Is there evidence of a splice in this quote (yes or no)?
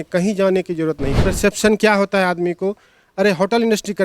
yes